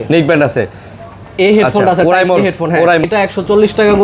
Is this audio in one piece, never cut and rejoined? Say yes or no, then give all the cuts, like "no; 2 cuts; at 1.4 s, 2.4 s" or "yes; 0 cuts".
no; 1 cut; at 3.0 s